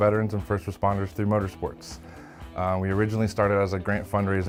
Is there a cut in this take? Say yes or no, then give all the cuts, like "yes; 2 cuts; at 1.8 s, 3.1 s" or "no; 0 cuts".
no; 0 cuts